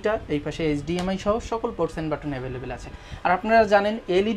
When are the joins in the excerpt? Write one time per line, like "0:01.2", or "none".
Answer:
none